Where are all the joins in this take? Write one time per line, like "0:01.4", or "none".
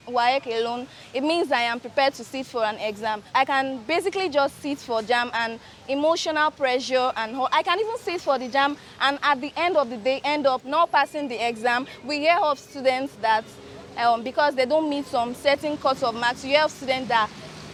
none